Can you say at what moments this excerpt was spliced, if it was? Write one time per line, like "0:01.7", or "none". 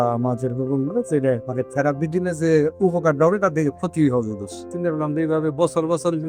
0:01.5
0:04.7

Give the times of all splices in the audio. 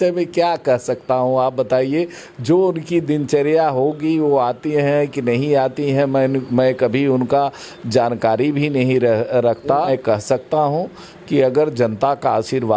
0:09.9

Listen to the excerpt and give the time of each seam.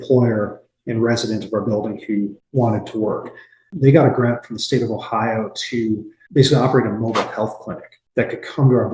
0:03.6

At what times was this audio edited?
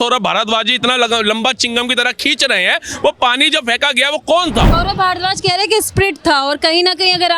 0:04.7

